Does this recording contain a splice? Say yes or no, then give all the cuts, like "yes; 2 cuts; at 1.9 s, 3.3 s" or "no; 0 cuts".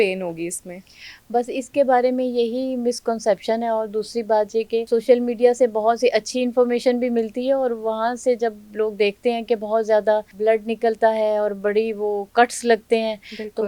no; 0 cuts